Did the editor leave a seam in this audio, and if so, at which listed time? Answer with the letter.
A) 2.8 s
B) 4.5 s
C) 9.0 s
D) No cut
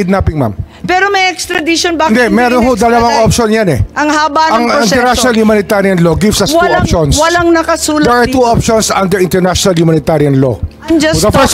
D